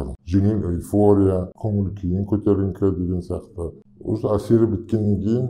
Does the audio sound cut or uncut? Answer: uncut